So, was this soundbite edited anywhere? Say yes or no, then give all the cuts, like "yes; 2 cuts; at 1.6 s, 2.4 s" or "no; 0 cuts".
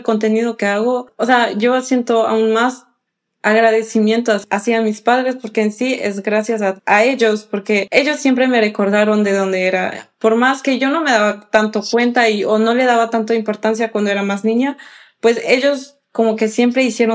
yes; 4 cuts; at 1.1 s, 4.4 s, 6.8 s, 7.9 s